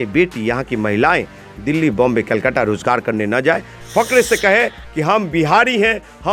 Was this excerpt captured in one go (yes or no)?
yes